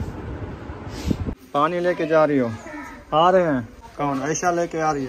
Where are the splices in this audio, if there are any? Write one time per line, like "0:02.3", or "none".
0:01.4
0:03.8